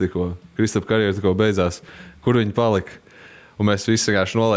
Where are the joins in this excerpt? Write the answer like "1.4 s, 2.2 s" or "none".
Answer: none